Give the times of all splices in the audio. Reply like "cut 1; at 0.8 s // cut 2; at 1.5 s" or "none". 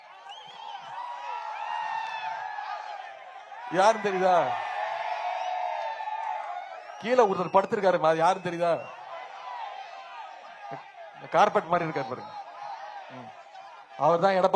none